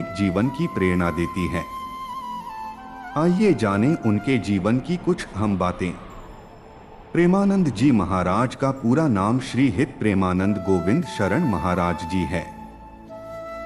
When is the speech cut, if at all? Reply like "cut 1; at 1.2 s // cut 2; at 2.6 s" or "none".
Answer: cut 1; at 1.9 s // cut 2; at 3.1 s